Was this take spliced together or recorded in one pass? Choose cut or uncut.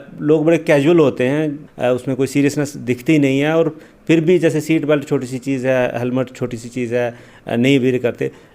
cut